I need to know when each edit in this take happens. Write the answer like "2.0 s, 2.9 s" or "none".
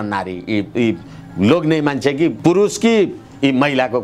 2.4 s